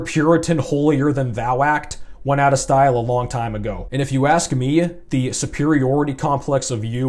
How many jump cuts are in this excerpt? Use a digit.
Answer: 1